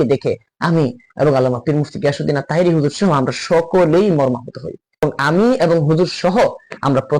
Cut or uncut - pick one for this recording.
cut